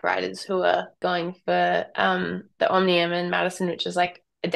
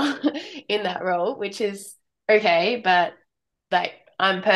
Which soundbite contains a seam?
first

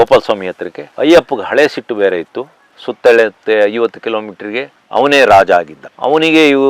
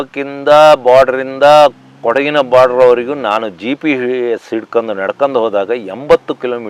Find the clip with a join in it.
first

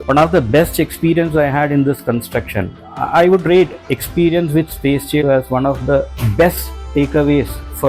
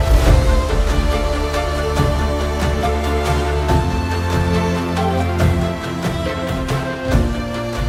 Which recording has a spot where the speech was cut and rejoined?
first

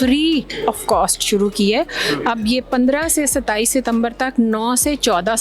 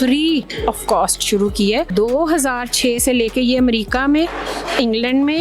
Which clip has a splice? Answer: second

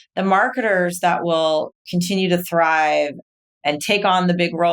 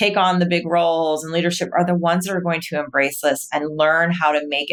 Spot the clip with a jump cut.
first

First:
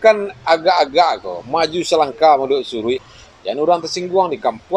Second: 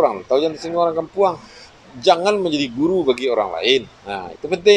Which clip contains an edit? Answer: first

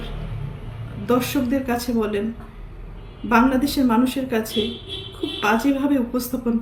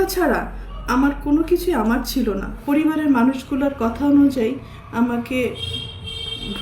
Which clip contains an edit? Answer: second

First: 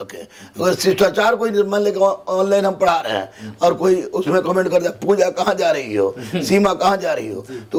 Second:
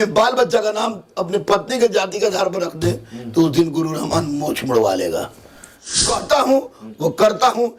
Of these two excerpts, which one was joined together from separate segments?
second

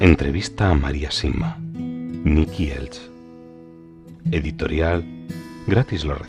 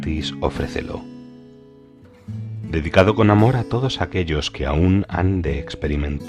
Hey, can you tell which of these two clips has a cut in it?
second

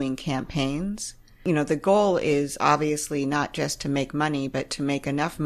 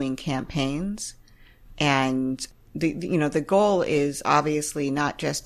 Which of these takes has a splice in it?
first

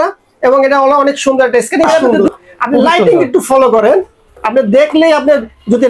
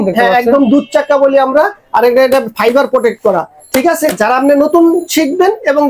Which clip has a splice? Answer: first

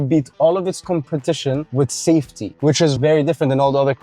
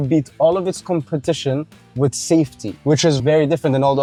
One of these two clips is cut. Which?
first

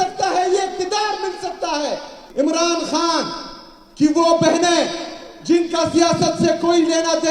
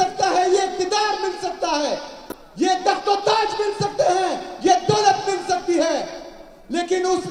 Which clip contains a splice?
first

